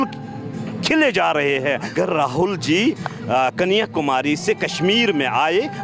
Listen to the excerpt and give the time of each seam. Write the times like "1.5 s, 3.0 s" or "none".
1.9 s